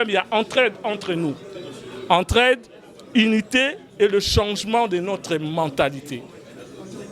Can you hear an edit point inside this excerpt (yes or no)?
no